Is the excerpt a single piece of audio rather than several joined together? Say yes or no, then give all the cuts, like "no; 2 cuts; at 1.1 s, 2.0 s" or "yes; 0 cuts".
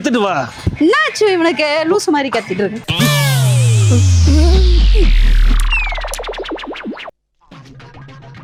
yes; 0 cuts